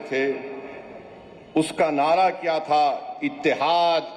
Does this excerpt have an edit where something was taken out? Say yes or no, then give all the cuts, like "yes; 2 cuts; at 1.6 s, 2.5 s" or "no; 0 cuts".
no; 0 cuts